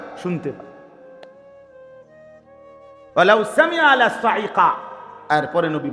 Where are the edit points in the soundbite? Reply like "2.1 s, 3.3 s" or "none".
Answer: 0.9 s, 3.1 s